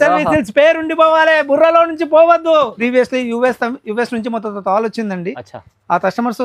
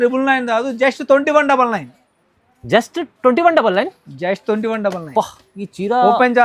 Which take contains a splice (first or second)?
first